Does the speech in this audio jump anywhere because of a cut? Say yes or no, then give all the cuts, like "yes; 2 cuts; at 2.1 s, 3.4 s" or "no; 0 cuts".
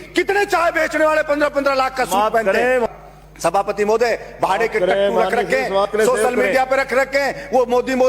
yes; 1 cut; at 2.9 s